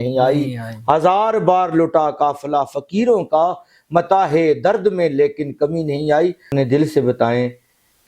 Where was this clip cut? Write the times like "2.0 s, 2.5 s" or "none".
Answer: 6.5 s